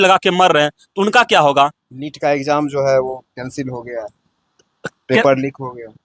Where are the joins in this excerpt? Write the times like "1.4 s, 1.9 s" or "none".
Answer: none

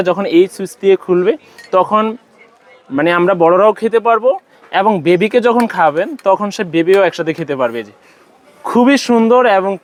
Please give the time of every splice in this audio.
none

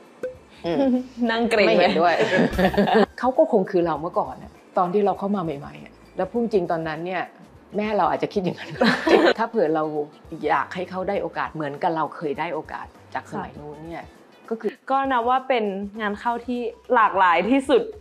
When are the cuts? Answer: 3.1 s, 9.4 s, 14.7 s

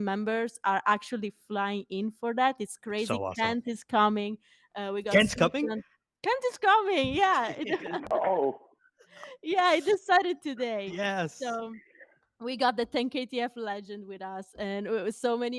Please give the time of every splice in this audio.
none

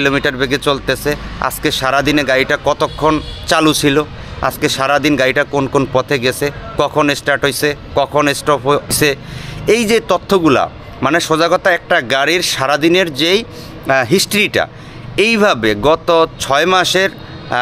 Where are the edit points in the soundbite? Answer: 8.9 s

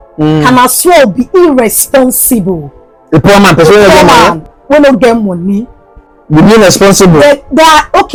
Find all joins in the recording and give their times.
none

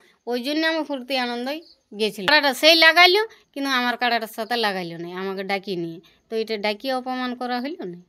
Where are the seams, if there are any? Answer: 2.3 s

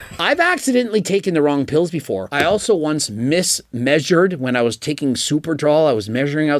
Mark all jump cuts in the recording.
2.3 s

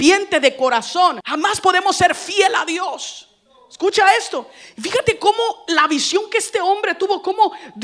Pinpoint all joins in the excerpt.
1.3 s

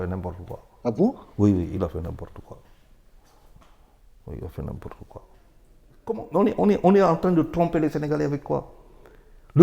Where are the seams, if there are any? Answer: 6.2 s

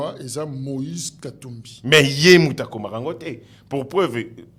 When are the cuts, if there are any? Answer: none

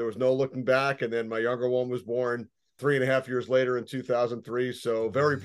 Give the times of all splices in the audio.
2.8 s

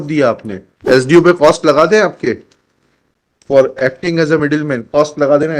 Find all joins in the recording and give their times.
1.1 s

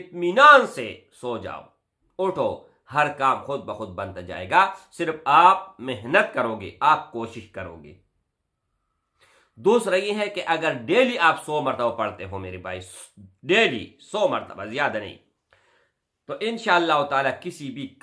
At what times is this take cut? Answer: none

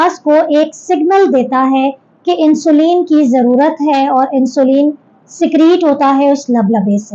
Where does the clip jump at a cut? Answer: none

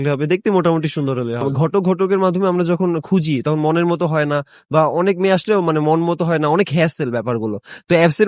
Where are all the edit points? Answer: 1.5 s

